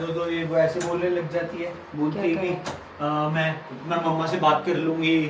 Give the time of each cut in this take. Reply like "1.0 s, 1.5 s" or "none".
none